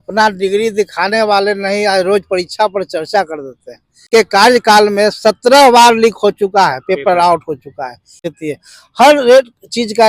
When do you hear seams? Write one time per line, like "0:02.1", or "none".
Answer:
0:04.1
0:08.2

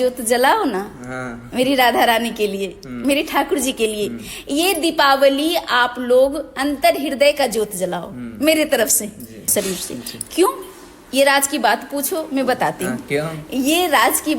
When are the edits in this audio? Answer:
0:09.5

